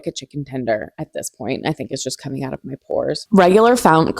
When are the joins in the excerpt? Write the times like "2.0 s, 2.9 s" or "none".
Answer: 3.2 s